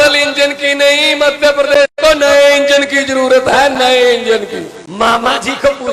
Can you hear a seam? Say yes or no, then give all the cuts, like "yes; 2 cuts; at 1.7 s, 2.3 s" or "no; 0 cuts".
yes; 1 cut; at 4.8 s